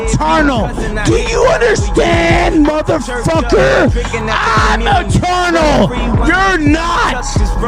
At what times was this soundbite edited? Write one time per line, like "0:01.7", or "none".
0:01.7